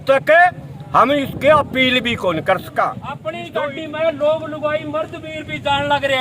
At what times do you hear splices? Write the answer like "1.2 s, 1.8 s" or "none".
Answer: 3.4 s